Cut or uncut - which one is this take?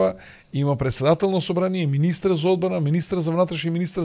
uncut